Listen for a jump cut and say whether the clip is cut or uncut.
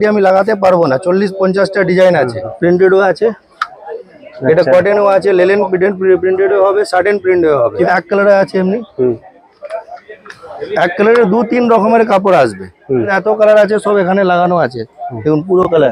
cut